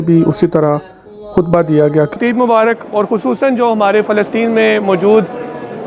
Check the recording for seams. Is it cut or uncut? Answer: cut